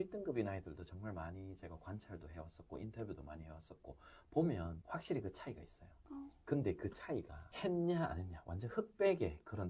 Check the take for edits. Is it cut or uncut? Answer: uncut